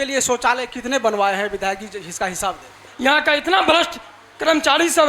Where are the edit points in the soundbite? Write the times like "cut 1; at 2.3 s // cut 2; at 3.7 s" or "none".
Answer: cut 1; at 2.8 s